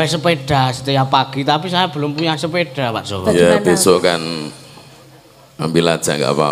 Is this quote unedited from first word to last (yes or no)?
yes